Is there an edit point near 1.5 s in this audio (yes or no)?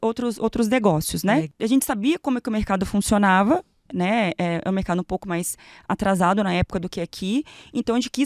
yes